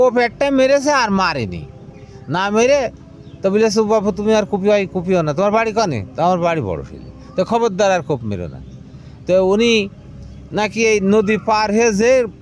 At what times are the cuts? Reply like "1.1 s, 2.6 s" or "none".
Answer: none